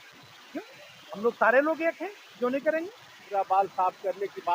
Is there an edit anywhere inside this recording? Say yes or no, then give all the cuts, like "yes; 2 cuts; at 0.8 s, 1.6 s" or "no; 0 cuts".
yes; 1 cut; at 3.3 s